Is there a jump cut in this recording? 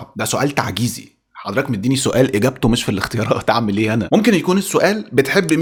no; 0 cuts

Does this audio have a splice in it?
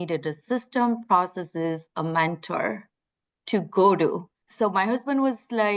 no; 0 cuts

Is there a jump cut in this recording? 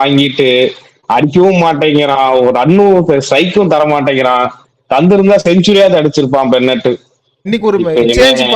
yes; 1 cut; at 7.4 s

